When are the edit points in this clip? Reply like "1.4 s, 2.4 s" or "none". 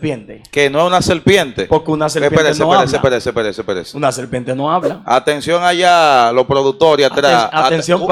none